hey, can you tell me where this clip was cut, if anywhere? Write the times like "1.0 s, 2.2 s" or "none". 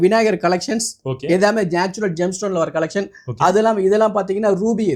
none